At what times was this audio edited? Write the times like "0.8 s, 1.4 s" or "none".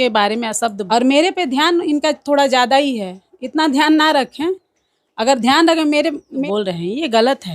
0.8 s, 6.4 s